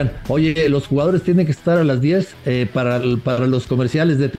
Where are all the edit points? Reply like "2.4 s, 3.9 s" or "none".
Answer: 2.4 s